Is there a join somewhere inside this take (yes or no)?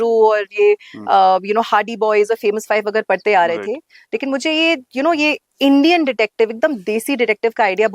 no